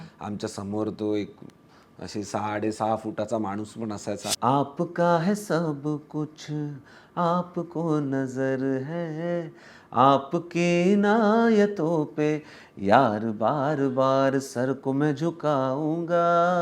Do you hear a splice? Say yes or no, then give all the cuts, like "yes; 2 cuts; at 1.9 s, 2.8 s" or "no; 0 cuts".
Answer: yes; 1 cut; at 4.3 s